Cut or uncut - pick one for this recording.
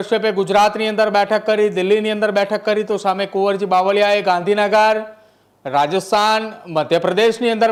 uncut